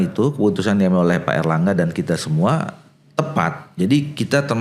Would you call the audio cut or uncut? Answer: uncut